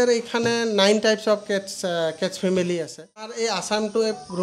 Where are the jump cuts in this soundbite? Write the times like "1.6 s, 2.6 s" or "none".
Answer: 3.3 s